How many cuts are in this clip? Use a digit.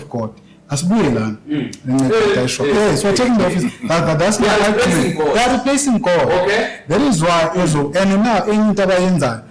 0